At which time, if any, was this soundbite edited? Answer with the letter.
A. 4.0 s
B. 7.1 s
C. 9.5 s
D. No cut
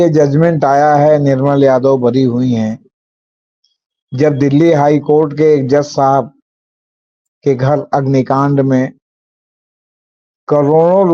D